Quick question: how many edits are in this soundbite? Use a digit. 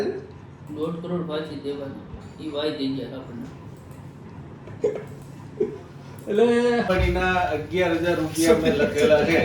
1